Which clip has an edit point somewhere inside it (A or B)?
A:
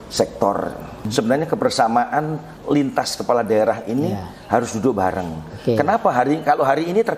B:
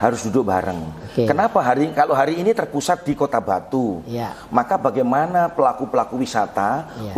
A